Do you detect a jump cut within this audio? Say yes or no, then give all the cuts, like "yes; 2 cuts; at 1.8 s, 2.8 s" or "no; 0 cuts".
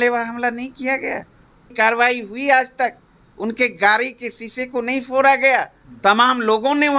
yes; 2 cuts; at 1.7 s, 5.8 s